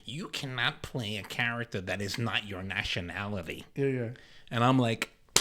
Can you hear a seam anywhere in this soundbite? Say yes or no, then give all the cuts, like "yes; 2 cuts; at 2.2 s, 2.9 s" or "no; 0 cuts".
no; 0 cuts